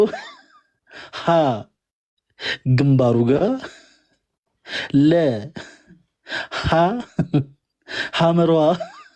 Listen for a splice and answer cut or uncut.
uncut